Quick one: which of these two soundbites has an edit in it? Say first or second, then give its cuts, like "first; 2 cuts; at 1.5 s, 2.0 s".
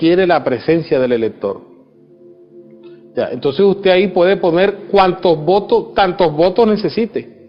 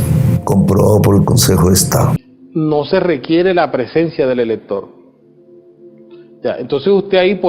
second; 1 cut; at 2.2 s